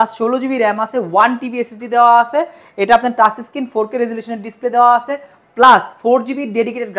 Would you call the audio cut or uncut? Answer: uncut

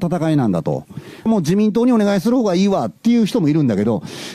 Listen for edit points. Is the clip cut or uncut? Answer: cut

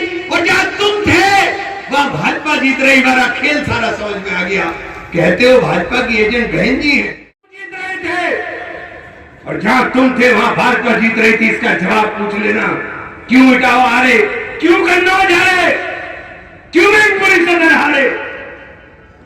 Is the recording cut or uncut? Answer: cut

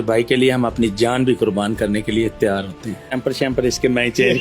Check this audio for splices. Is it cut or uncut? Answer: cut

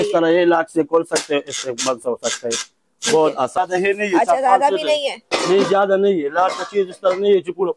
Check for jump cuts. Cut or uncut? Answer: cut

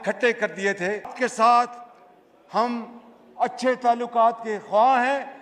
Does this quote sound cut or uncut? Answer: cut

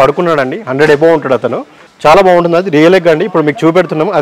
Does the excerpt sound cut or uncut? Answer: uncut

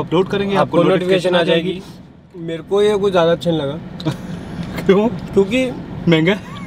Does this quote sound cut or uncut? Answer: cut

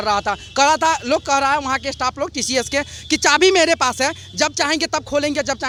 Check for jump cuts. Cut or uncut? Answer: uncut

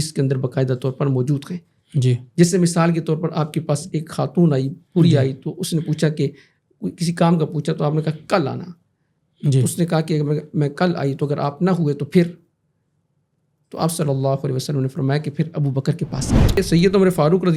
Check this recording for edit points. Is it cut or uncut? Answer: cut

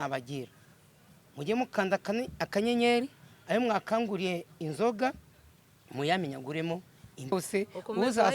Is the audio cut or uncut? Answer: cut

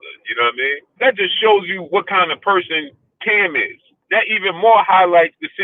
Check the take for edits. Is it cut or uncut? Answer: cut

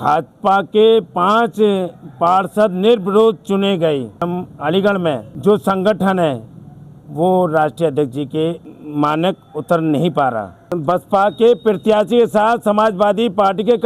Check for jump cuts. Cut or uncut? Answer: cut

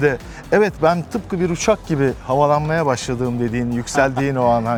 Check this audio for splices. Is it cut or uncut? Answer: uncut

